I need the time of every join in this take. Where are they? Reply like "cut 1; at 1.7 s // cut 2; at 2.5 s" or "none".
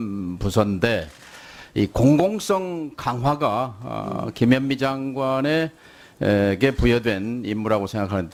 none